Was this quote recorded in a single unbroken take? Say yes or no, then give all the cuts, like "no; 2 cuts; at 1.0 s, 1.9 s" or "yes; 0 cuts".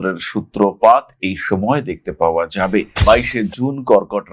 no; 1 cut; at 2.9 s